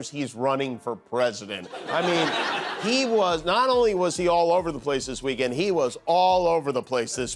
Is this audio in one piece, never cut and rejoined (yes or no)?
yes